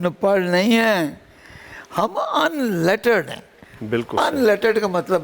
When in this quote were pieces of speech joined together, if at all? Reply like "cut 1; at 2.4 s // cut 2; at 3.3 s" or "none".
none